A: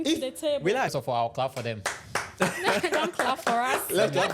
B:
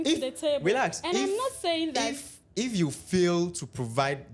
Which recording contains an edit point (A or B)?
A